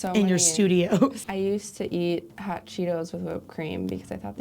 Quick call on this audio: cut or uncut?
cut